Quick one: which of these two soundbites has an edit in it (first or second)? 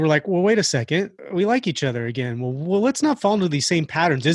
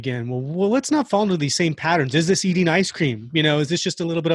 first